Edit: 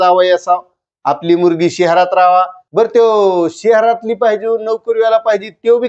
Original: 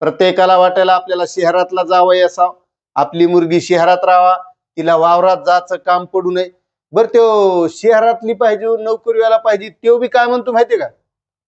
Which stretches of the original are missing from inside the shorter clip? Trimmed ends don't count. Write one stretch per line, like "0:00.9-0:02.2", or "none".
0:04.5-0:06.8